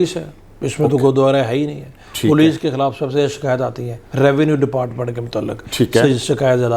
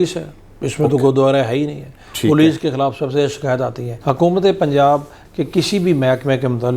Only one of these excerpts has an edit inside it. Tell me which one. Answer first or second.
second